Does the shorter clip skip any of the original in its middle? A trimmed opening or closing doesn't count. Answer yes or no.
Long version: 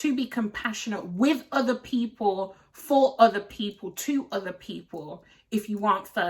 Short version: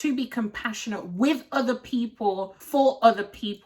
yes